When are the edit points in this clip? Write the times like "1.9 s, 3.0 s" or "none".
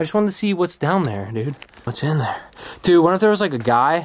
1.9 s